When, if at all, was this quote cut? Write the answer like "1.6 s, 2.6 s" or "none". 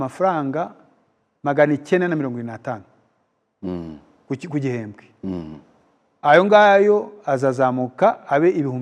none